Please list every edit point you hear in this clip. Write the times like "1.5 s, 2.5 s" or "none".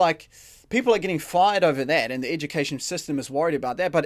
none